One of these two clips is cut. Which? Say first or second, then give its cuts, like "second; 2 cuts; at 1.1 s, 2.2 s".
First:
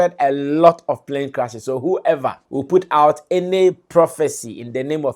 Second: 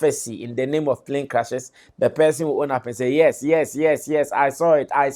first; 1 cut; at 2.4 s